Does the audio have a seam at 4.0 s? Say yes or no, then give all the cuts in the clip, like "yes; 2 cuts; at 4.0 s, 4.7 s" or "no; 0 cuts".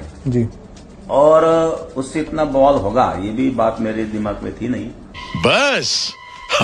no; 1 cut; at 5.3 s